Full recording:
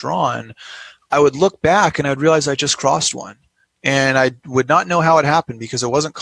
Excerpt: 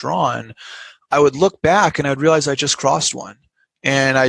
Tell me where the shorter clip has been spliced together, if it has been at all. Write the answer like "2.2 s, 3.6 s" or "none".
none

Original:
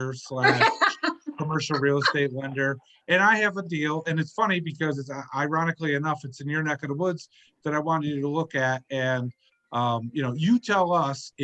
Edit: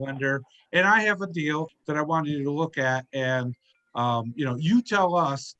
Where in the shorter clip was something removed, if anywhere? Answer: 1.7 s

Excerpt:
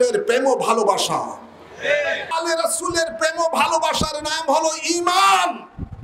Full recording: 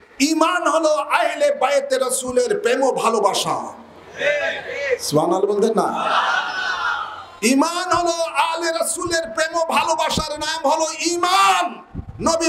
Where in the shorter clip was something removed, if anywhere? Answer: 2.3 s

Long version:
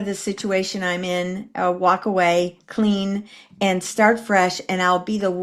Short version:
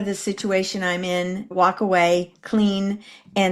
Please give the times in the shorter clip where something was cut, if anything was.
1.5 s

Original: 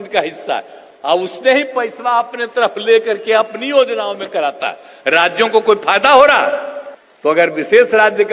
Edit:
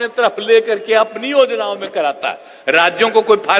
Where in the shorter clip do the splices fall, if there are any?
none

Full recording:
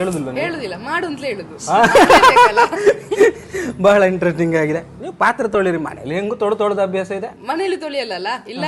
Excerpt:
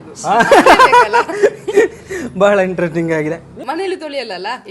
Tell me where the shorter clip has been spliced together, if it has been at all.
3.5 s

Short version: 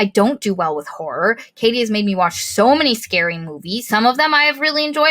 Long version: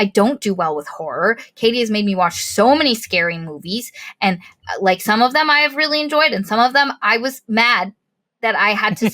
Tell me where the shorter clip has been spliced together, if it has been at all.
3.9 s

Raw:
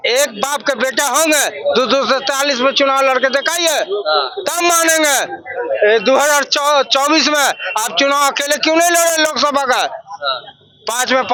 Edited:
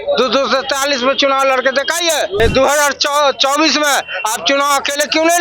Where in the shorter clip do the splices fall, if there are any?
2.4 s

